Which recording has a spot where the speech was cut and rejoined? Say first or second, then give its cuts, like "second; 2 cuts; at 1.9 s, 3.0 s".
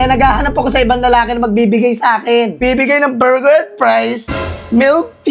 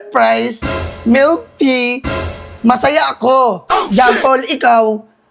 first; 1 cut; at 2.6 s